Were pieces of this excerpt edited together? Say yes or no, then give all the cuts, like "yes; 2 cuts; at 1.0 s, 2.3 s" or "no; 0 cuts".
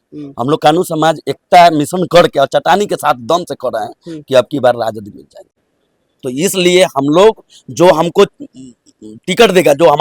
yes; 1 cut; at 5.5 s